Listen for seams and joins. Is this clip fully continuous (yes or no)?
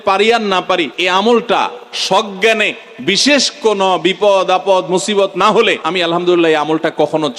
no